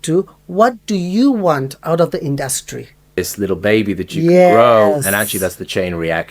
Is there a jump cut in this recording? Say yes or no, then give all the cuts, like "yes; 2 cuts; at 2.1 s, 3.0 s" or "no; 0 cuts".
yes; 1 cut; at 3.2 s